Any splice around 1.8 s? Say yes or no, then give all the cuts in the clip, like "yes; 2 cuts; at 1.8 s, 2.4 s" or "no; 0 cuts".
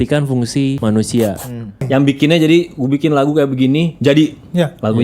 yes; 2 cuts; at 0.8 s, 1.8 s